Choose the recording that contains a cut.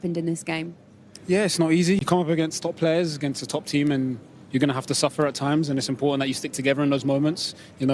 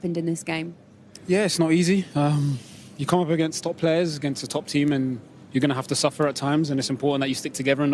first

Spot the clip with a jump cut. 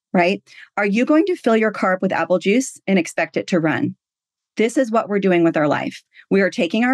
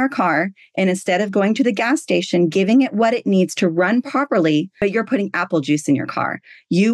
second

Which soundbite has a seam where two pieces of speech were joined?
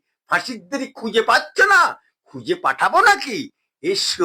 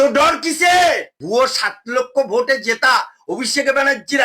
second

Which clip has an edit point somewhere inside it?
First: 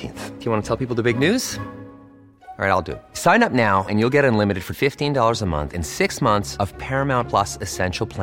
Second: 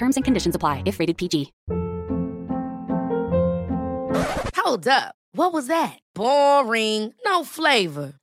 second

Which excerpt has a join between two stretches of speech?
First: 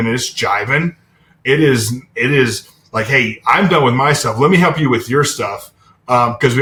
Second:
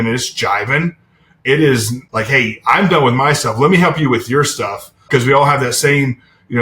second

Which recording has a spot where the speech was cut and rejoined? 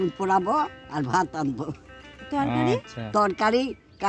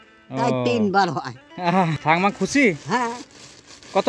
second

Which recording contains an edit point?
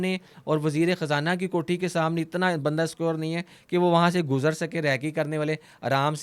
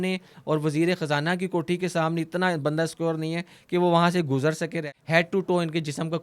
second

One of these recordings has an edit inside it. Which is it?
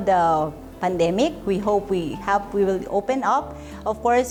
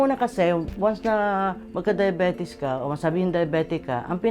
second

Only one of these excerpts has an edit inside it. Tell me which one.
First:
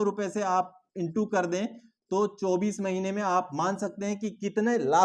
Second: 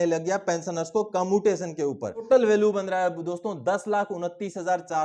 second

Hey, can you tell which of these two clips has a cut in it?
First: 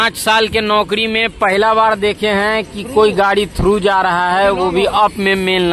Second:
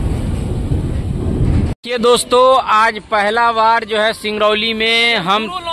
second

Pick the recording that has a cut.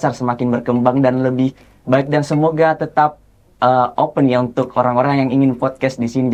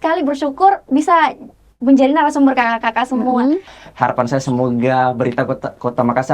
second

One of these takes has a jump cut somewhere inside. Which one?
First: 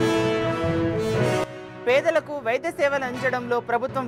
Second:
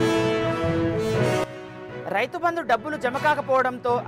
second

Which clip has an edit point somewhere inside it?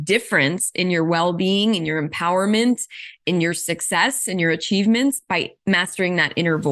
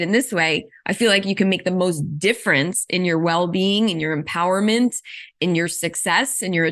first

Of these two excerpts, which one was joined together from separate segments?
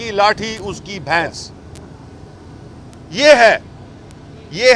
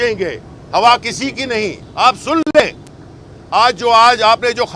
second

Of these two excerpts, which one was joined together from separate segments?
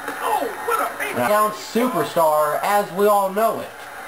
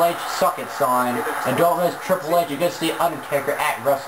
first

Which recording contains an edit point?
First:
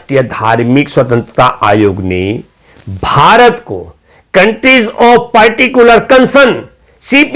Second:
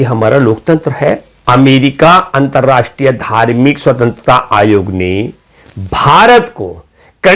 second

